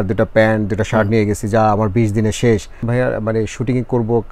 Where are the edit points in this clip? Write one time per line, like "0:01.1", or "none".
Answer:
0:02.9